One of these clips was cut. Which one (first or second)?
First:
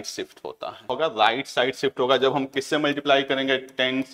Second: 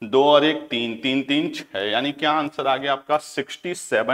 first